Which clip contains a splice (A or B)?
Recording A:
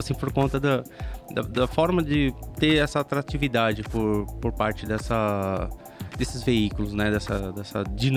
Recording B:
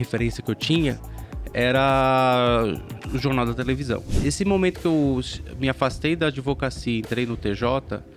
B